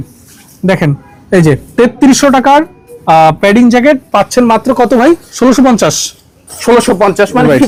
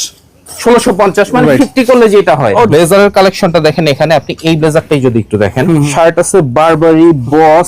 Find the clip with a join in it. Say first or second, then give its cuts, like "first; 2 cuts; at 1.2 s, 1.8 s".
second; 2 cuts; at 2.7 s, 5.9 s